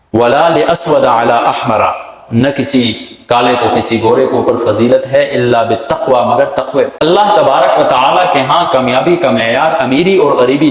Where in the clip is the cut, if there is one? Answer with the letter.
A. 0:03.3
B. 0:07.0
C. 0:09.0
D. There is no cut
B